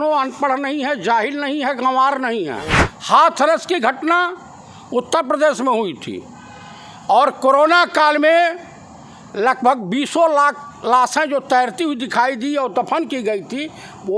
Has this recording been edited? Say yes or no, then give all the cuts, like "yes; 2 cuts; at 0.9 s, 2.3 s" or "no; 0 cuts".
yes; 1 cut; at 2.9 s